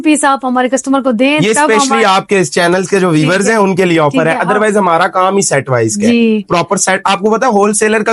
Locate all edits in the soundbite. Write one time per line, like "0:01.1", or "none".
none